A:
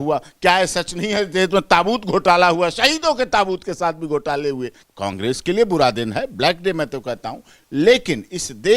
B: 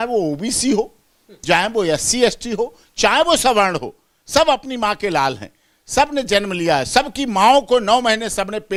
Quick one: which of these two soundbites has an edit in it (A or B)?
A